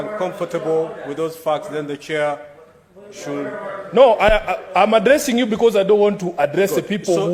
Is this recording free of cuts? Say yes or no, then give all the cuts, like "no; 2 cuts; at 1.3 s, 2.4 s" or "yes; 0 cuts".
yes; 0 cuts